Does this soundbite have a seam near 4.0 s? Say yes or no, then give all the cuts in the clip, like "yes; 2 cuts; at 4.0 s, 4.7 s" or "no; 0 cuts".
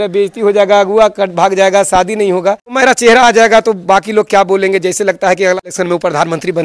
no; 2 cuts; at 2.8 s, 5.7 s